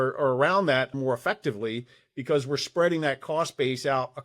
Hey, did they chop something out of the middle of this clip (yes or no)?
yes